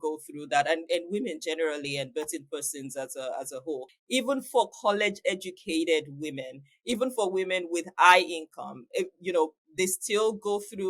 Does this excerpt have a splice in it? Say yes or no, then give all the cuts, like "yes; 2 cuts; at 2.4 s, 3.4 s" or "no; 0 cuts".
yes; 1 cut; at 3.9 s